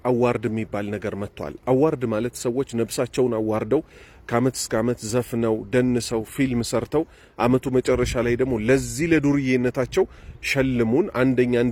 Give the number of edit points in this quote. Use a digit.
0